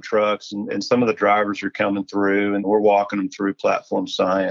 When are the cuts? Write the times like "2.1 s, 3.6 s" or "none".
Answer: 2.6 s